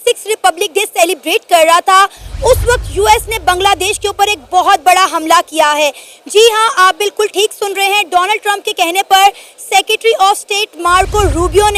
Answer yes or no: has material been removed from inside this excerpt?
no